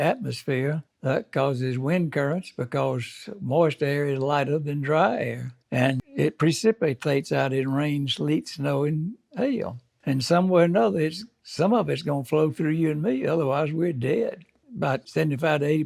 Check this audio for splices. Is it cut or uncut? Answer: uncut